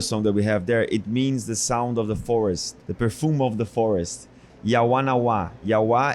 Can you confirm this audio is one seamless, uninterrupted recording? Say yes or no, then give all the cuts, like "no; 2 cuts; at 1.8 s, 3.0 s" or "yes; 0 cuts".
no; 2 cuts; at 2.7 s, 4.5 s